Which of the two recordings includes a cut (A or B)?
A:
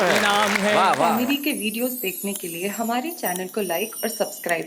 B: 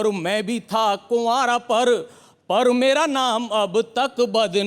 A